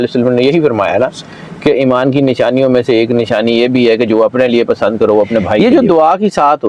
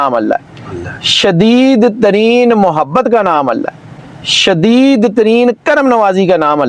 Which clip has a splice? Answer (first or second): first